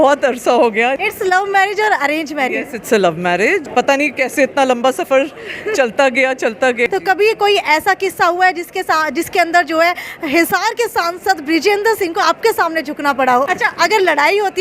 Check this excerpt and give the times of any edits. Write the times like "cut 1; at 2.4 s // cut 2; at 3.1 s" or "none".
cut 1; at 1.0 s // cut 2; at 3.7 s // cut 3; at 6.9 s // cut 4; at 13.5 s